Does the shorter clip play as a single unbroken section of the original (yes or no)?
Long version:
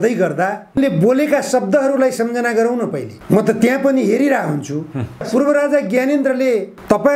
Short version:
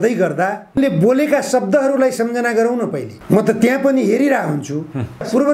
yes